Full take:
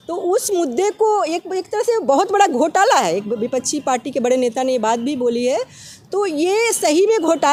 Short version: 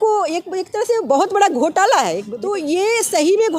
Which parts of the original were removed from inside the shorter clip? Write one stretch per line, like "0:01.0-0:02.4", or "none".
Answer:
0:03.3-0:06.0